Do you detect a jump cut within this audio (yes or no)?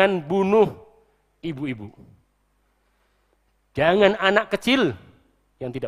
no